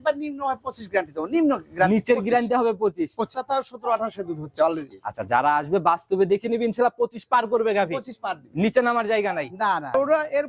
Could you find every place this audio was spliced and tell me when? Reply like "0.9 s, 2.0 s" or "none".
3.4 s